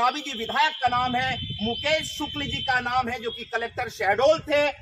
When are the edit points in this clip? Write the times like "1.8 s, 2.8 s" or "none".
none